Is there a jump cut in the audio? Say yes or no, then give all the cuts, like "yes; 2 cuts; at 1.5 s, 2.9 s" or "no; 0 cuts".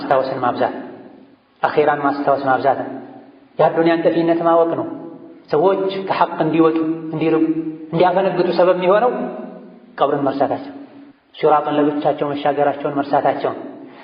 no; 0 cuts